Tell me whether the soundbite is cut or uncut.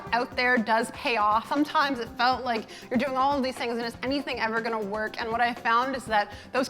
cut